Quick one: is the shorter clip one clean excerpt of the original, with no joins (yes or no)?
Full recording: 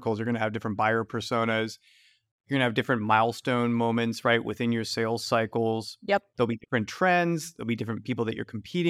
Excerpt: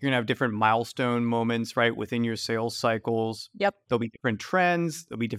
yes